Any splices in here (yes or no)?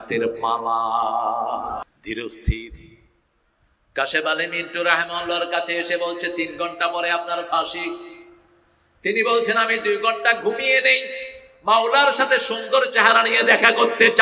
no